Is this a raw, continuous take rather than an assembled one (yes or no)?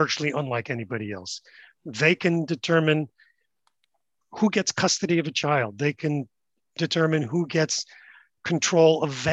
yes